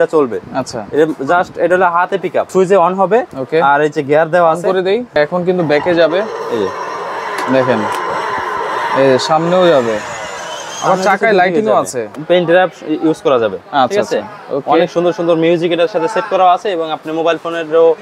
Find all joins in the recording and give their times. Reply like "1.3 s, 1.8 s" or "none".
2.5 s, 5.2 s, 12.1 s